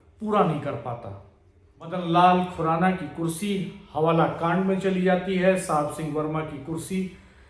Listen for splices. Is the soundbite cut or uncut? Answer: cut